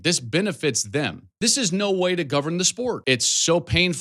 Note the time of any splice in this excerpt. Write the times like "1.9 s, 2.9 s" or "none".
1.2 s, 3.0 s